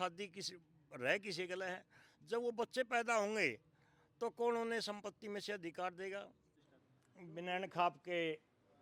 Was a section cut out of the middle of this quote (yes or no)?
yes